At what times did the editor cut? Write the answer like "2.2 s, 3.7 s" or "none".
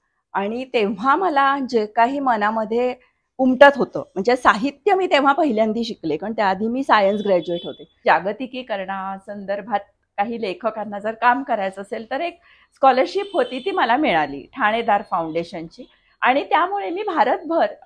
8.0 s